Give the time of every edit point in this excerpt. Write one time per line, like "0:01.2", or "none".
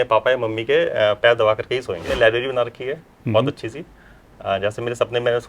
0:02.1